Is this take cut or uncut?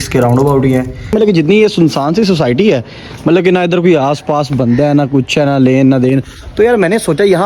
cut